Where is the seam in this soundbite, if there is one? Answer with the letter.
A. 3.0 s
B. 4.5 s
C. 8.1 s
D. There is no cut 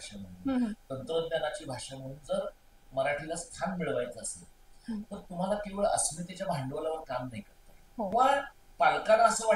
C